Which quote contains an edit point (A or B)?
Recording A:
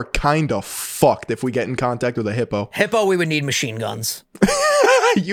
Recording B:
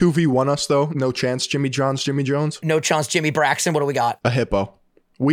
B